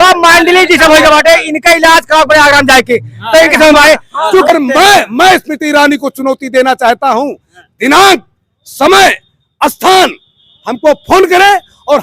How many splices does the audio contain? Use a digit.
1